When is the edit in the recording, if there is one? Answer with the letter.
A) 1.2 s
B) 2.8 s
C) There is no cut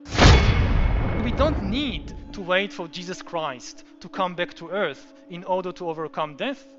A